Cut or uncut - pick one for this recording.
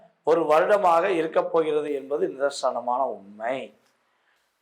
uncut